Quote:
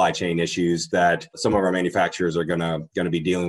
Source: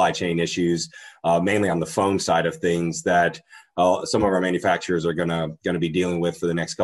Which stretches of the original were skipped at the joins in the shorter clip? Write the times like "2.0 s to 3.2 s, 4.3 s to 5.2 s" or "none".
1.3 s to 3.9 s